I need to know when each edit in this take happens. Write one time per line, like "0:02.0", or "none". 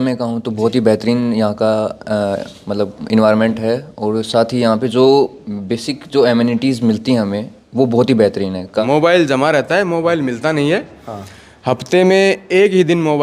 0:08.8